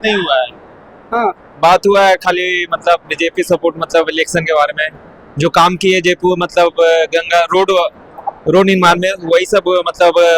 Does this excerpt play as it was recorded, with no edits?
yes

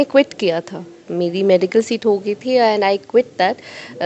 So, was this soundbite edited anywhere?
no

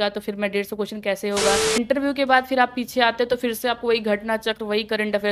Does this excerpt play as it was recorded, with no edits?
no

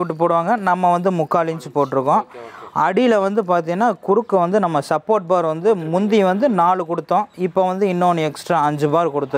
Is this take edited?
no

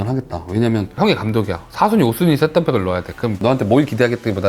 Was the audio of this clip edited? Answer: yes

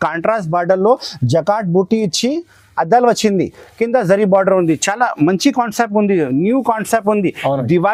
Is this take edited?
no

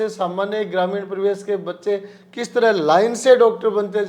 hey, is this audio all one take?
yes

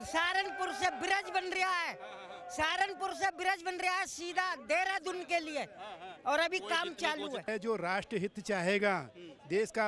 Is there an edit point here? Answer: yes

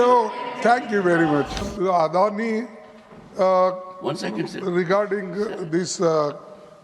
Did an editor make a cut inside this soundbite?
yes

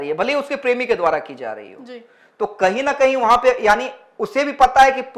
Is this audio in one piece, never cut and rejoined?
yes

